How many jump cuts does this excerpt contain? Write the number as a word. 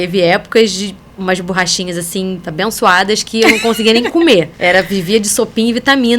two